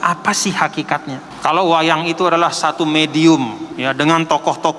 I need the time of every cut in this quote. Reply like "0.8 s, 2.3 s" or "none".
1.3 s, 3.6 s